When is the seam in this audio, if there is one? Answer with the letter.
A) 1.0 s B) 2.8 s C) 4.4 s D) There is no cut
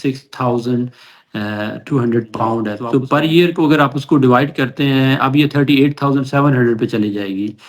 B